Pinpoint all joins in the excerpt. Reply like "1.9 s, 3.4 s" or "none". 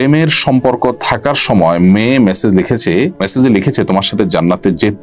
3.2 s